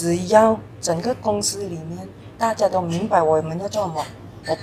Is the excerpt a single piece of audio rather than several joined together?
yes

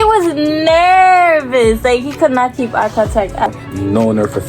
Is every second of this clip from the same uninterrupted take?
no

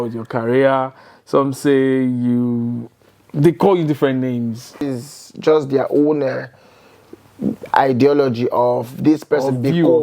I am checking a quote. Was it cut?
yes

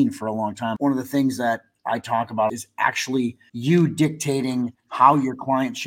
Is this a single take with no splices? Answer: no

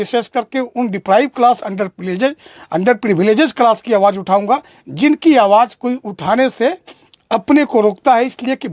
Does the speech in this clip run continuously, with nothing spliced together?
yes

